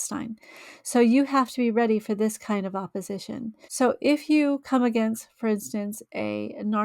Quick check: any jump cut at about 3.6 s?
yes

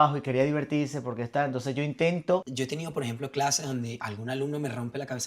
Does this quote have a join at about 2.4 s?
yes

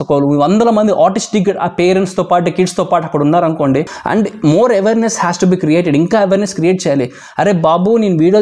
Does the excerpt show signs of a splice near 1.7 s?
no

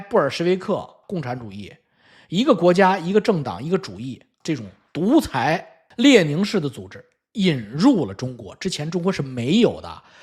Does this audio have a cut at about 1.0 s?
yes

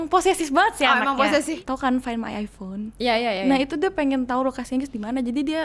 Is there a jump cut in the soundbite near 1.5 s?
yes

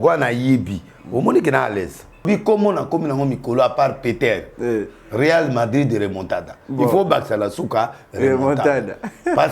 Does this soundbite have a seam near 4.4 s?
no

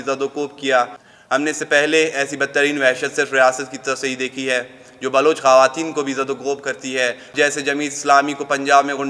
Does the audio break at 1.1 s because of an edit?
yes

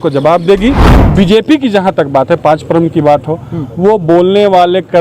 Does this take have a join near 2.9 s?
no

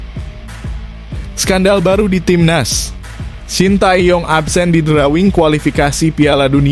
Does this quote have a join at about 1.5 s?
yes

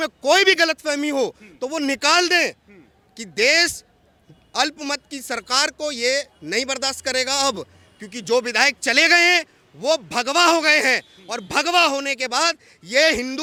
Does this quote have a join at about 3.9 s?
no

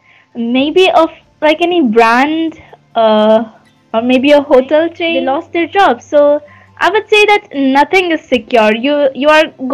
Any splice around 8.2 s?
no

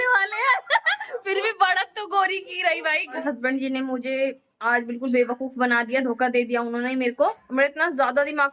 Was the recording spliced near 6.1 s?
no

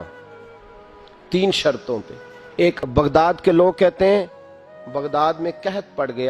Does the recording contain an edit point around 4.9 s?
no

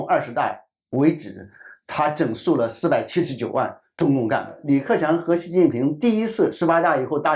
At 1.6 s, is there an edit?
no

